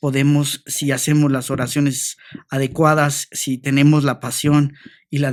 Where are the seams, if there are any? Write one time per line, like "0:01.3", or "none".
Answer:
none

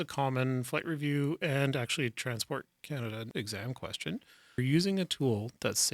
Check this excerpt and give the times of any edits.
0:03.3
0:04.6

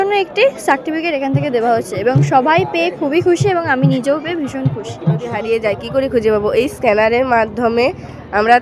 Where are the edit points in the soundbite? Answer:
0:05.3

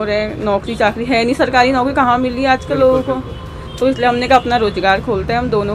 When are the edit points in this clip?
none

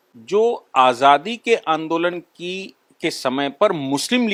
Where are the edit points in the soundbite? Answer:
none

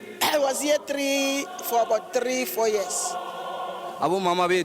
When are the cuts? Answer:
0:03.3

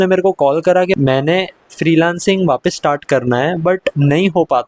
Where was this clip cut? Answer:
0:01.0
0:03.9

